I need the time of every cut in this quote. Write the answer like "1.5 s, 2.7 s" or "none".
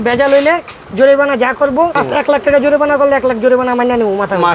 2.0 s